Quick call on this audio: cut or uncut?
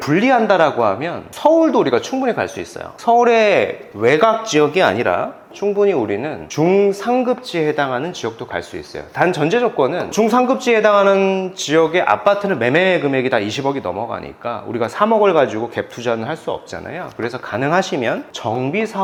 uncut